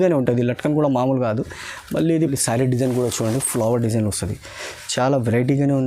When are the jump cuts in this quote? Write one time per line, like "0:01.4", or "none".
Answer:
0:02.3